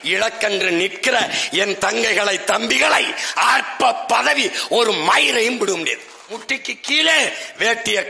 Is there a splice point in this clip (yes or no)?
yes